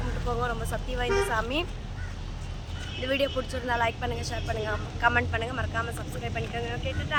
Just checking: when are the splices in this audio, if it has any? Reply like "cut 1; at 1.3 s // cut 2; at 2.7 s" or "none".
none